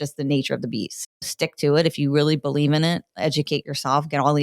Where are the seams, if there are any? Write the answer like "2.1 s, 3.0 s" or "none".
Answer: 0.9 s